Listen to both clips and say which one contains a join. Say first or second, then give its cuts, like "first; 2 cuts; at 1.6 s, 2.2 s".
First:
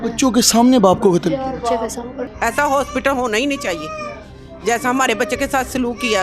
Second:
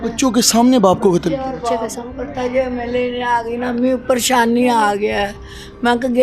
first; 1 cut; at 2.2 s